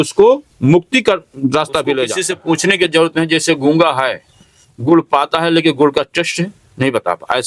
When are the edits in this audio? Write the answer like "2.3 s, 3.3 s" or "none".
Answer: 2.3 s